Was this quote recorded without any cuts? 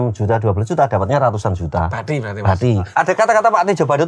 no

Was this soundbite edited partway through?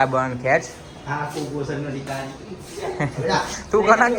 no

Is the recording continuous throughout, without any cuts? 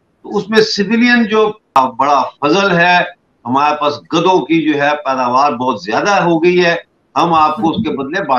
no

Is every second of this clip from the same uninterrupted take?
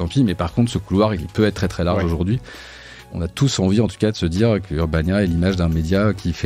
no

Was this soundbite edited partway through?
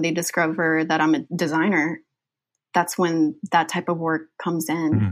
yes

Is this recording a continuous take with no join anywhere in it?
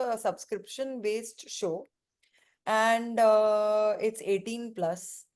yes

